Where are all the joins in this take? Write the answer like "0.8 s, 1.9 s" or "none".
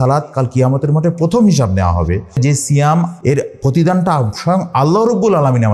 2.4 s, 3.2 s